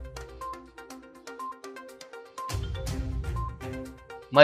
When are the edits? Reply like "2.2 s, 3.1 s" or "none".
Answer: 1.4 s, 1.9 s